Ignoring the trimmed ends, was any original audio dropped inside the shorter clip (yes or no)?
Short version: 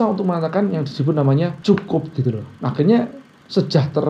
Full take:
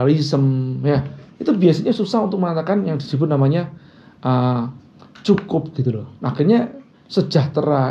yes